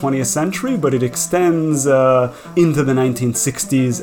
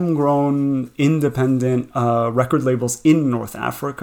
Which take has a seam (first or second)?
first